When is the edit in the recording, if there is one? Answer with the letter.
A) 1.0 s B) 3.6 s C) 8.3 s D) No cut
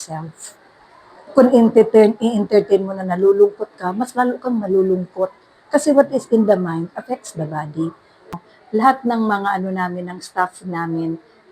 C